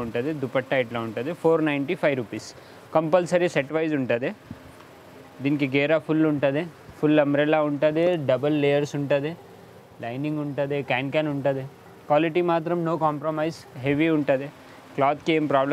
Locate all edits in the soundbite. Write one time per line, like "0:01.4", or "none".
none